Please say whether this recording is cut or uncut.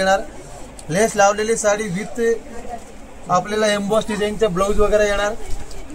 uncut